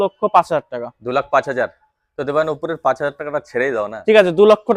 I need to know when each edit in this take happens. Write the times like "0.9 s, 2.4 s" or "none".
none